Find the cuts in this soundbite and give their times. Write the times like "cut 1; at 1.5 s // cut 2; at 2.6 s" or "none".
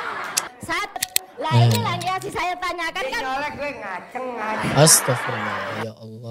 cut 1; at 1.0 s